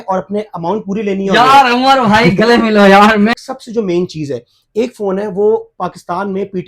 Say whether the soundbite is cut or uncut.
cut